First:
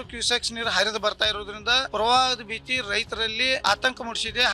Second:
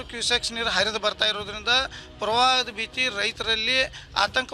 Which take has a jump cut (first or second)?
first